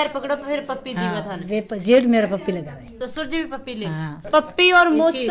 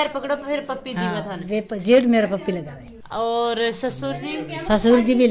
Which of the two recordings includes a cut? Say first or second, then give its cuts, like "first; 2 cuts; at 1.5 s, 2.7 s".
first; 2 cuts; at 2.9 s, 4.1 s